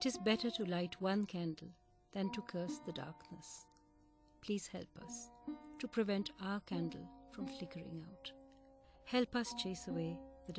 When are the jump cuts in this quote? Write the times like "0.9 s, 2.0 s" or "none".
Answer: none